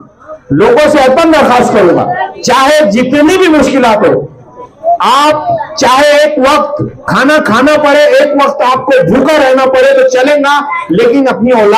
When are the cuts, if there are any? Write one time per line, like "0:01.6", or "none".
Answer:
none